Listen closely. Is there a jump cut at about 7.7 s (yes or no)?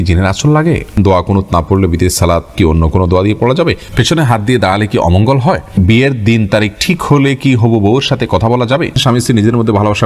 no